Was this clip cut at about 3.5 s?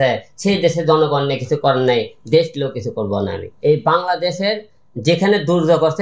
yes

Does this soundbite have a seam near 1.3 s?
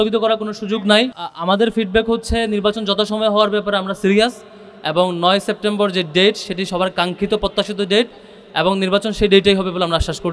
yes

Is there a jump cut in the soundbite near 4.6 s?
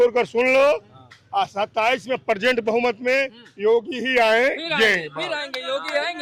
no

